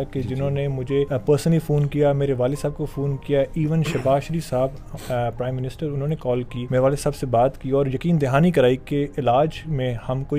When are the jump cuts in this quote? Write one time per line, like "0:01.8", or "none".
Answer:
0:01.1
0:06.6